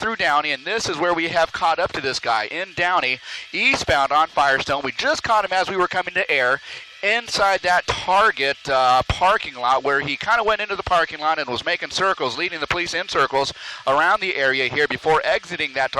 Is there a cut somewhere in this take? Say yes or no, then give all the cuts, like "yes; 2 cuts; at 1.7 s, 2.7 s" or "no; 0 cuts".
yes; 1 cut; at 2.7 s